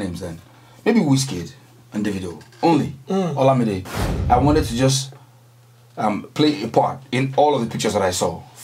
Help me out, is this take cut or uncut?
cut